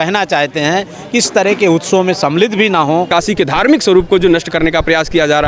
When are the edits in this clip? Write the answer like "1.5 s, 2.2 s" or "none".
3.1 s